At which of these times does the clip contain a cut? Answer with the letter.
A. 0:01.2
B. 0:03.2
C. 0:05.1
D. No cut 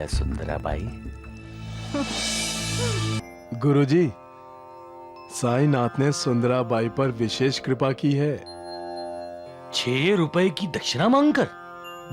B